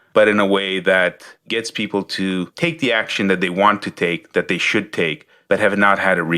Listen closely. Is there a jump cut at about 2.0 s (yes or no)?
no